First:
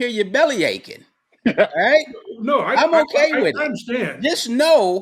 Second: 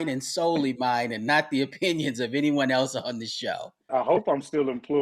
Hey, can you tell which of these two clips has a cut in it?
second; 1 cut; at 3.9 s

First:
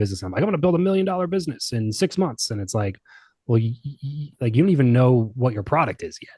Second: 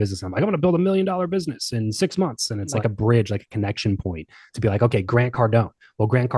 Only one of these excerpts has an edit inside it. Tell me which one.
second; 1 cut; at 2.8 s

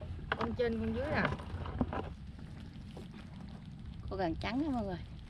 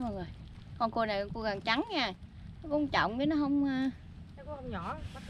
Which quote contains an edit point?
first; 1 cut; at 2.2 s

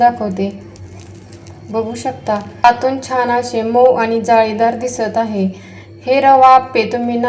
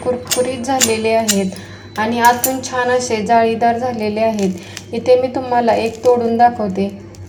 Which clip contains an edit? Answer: first; 1 cut; at 2.6 s

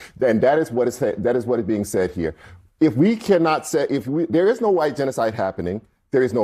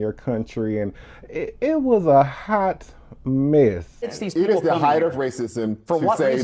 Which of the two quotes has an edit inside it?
second; 1 cut; at 4.2 s

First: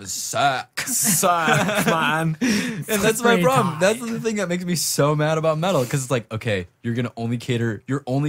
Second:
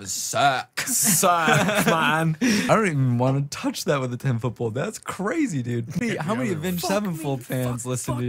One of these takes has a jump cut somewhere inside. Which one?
second; 2 cuts; at 2.7 s, 6.0 s

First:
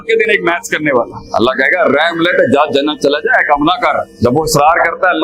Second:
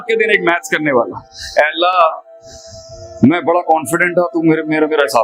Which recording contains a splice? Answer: first; 2 cuts; at 1.2 s, 4.1 s

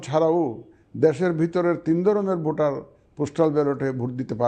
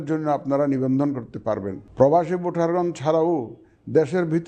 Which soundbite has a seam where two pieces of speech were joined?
second; 1 cut; at 1.8 s

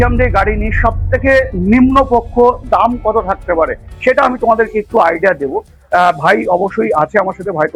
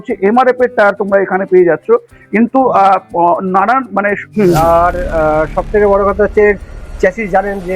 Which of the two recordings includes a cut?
second; 1 cut; at 4.2 s

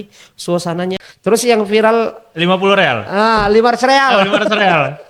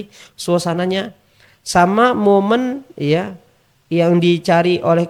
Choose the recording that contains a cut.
first; 1 cut; at 1.1 s

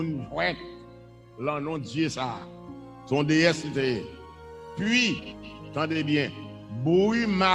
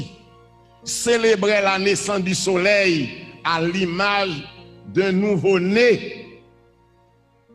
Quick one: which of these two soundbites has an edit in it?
second; 1 cut; at 6.3 s

